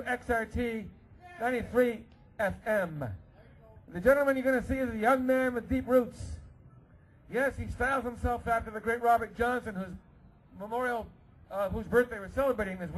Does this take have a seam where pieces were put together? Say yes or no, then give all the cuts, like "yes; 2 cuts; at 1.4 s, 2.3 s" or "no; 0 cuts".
no; 0 cuts